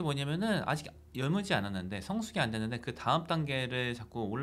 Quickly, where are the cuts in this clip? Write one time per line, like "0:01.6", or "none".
none

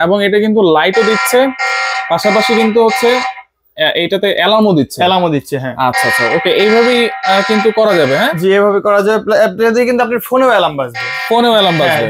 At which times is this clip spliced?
none

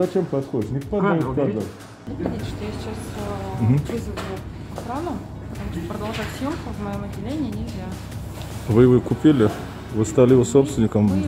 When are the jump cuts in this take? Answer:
0:02.1
0:05.5

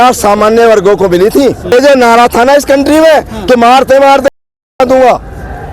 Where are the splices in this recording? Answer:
0:01.7

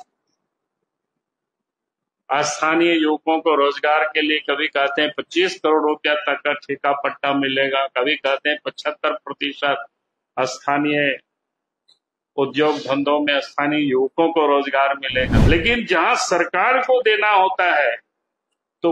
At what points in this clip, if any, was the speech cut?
0:15.4

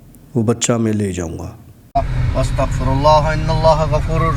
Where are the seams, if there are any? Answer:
0:01.9

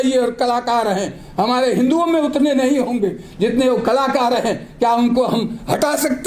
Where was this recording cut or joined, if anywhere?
none

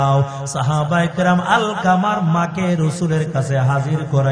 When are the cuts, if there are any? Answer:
none

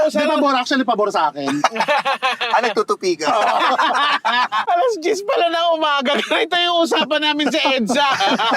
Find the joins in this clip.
0:04.6

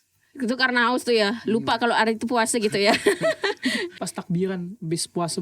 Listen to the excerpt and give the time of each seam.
0:04.0

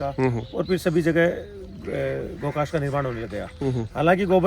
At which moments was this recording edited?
none

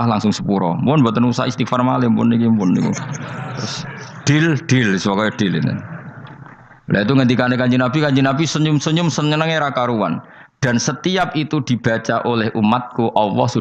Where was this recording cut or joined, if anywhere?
none

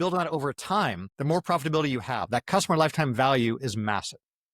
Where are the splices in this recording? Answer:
0:01.1

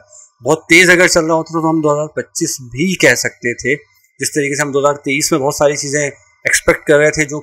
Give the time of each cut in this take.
none

